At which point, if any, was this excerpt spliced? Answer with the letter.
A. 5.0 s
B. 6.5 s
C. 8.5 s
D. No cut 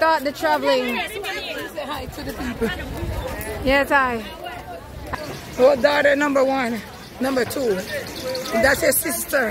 A